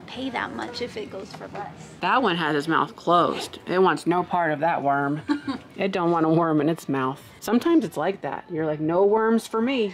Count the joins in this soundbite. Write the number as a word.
two